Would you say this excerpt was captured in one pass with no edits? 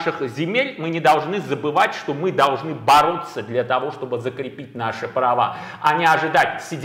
yes; 0 cuts

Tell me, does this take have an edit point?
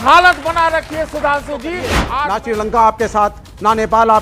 yes; 1 cut; at 2.0 s

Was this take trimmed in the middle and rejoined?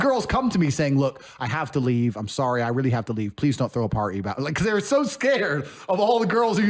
no; 0 cuts

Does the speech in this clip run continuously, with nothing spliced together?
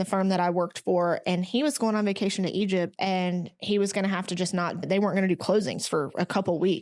no; 2 cuts; at 2.9 s, 4.9 s

